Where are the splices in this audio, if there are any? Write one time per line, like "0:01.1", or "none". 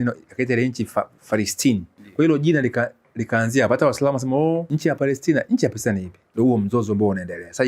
0:02.0
0:04.7
0:06.2